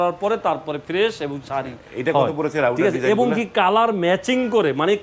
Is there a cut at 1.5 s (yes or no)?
no